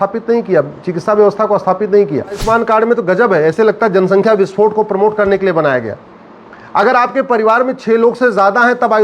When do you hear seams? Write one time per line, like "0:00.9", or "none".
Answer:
0:02.4